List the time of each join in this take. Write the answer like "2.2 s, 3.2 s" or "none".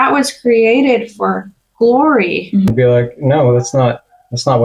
2.7 s